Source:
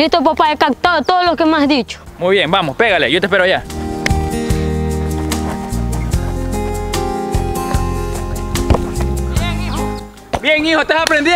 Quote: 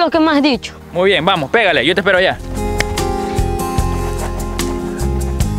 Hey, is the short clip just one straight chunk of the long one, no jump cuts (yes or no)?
no